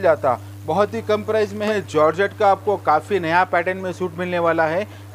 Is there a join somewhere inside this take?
yes; 1 cut; at 1.6 s

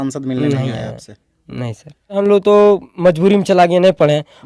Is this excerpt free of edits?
no; 1 cut; at 2.2 s

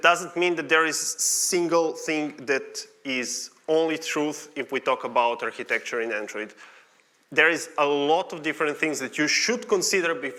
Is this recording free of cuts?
yes; 0 cuts

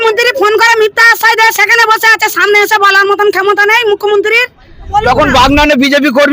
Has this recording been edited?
yes; 1 cut; at 5.0 s

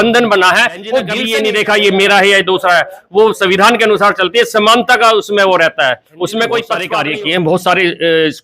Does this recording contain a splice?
yes; 2 cuts; at 1.2 s, 6.8 s

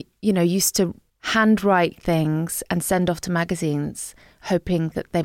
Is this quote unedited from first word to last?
no; 1 cut; at 1.0 s

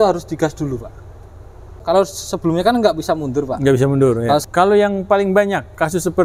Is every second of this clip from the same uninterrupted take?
no; 2 cuts; at 1.8 s, 4.4 s

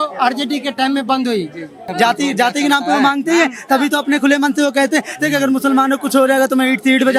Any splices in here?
yes; 1 cut; at 1.8 s

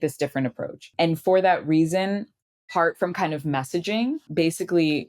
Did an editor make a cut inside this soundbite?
yes; 3 cuts; at 0.9 s, 2.7 s, 4.3 s

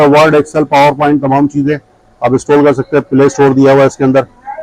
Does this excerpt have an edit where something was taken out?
no; 0 cuts

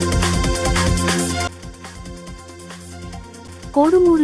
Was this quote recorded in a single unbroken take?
no; 1 cut; at 1.4 s

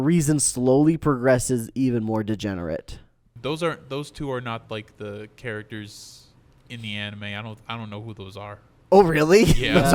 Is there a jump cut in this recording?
yes; 1 cut; at 3.4 s

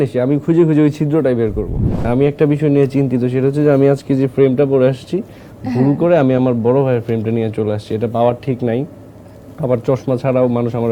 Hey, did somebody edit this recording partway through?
yes; 1 cut; at 2.0 s

